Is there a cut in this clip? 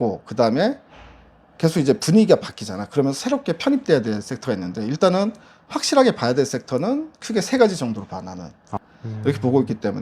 yes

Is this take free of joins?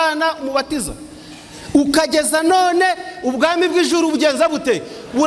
yes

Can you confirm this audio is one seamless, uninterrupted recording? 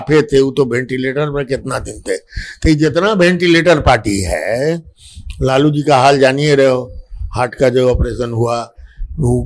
yes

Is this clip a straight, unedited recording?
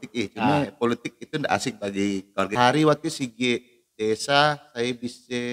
no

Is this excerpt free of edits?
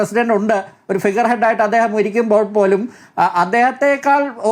yes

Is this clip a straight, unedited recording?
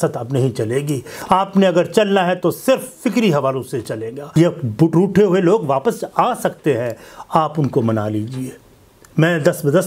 no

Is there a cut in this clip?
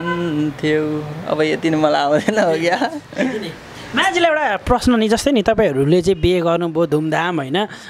no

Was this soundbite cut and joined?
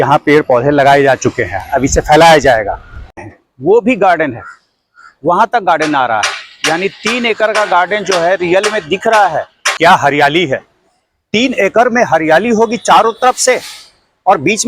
yes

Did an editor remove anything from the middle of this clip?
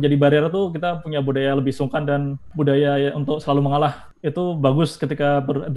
yes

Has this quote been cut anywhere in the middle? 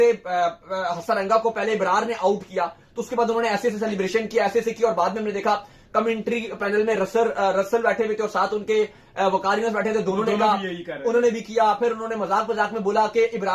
no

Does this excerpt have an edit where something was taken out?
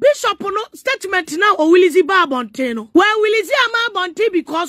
yes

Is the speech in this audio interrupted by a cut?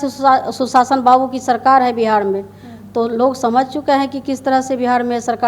no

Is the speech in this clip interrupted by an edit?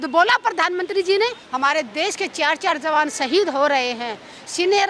yes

